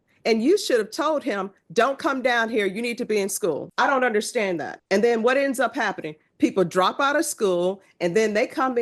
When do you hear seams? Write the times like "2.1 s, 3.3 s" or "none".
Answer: 3.7 s, 4.7 s